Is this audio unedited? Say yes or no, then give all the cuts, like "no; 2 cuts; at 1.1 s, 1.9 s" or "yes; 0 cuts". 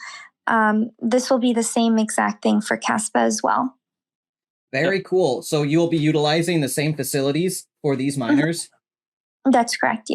yes; 0 cuts